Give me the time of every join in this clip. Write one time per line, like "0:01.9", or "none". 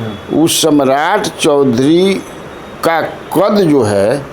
none